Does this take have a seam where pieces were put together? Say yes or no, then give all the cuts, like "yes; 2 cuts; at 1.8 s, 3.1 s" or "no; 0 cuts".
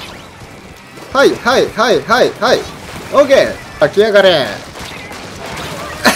yes; 1 cut; at 3.8 s